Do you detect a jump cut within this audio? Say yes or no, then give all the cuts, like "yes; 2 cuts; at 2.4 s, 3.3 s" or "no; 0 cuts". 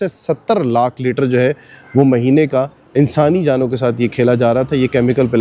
no; 0 cuts